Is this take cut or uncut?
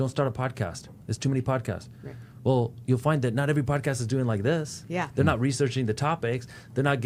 uncut